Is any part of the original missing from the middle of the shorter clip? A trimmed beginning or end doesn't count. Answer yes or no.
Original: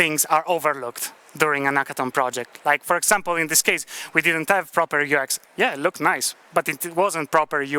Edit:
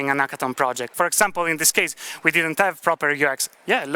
yes